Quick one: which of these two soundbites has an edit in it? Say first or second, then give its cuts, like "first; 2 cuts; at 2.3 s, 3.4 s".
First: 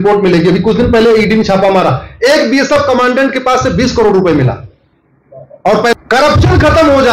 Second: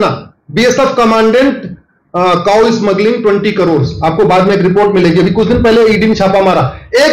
first; 1 cut; at 5.9 s